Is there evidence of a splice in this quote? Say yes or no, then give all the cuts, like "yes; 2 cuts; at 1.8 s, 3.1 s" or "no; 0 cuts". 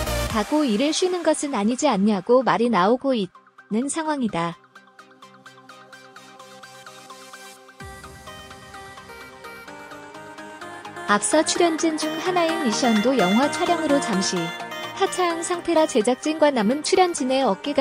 yes; 3 cuts; at 4.6 s, 9.0 s, 11.1 s